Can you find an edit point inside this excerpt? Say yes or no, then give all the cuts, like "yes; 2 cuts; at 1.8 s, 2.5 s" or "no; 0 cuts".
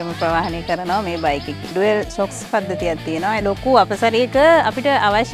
yes; 2 cuts; at 1.7 s, 3.4 s